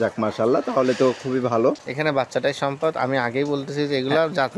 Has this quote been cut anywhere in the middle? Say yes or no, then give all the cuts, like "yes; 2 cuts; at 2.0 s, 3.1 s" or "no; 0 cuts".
yes; 1 cut; at 1.9 s